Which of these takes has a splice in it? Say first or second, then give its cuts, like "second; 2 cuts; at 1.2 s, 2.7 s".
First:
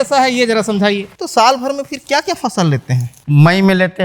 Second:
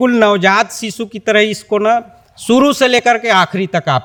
first; 2 cuts; at 1.2 s, 3.1 s